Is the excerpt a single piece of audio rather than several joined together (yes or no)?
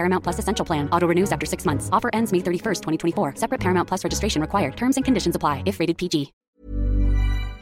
no